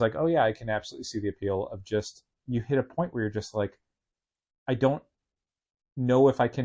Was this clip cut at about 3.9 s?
no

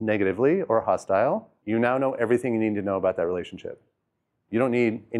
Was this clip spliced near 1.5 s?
yes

